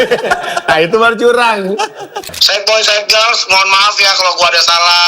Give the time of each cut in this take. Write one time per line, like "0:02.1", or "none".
0:02.4